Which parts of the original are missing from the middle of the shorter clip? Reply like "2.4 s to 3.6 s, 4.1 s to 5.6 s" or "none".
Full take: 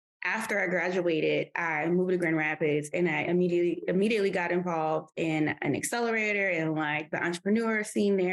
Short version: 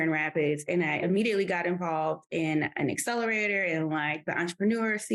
3.2 s to 3.8 s